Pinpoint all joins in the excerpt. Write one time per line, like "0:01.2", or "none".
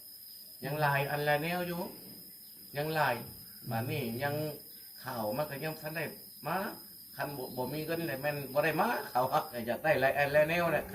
0:09.5